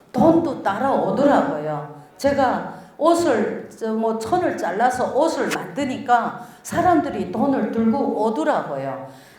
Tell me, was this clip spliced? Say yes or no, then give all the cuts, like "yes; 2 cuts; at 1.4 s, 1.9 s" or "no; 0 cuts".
no; 0 cuts